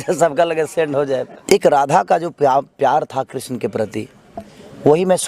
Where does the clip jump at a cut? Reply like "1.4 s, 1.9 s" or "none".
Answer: 1.3 s